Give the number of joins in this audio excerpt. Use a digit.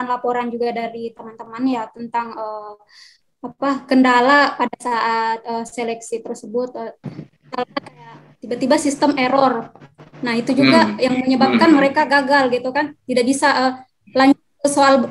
0